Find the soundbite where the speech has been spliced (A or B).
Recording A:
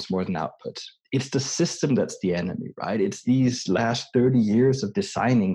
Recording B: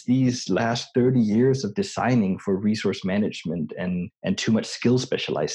B